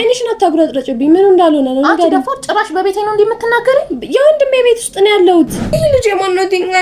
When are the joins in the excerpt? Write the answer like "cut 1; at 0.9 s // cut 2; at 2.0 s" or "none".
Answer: cut 1; at 5.6 s